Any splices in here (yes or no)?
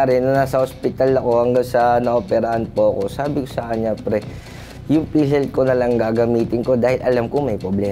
no